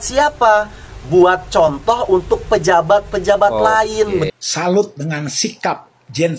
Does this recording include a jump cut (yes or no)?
yes